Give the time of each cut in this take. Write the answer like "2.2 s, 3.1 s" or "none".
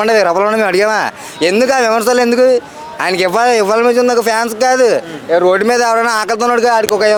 none

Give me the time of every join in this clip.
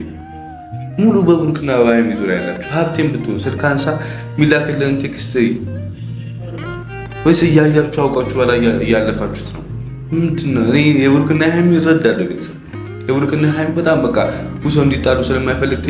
none

